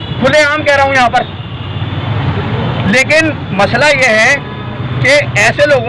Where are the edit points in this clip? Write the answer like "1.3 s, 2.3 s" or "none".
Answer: none